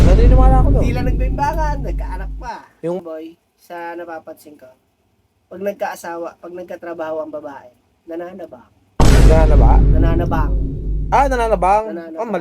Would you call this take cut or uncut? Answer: cut